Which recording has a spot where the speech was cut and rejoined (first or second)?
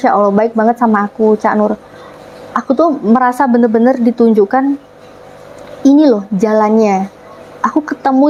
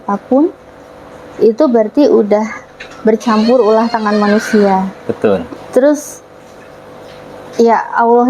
second